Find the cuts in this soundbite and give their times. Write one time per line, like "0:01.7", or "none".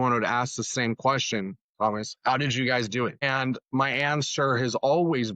0:03.2